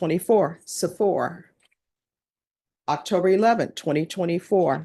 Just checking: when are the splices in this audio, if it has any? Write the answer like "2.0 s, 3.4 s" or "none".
none